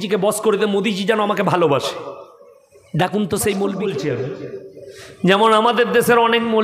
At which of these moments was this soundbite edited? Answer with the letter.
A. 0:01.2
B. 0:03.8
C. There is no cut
B